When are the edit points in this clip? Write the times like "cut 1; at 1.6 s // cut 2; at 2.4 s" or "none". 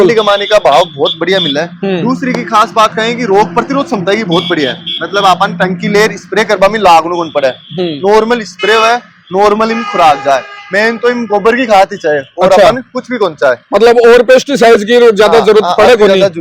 none